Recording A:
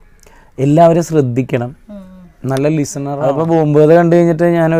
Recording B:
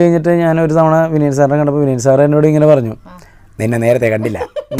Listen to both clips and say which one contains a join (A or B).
A